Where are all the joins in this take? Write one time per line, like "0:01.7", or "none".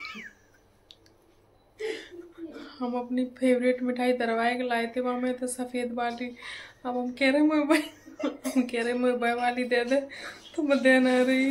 none